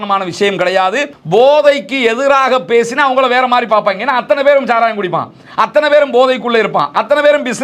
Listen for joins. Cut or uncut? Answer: cut